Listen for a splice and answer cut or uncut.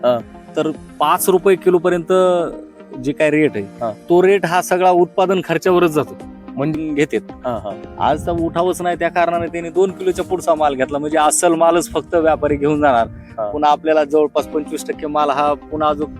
cut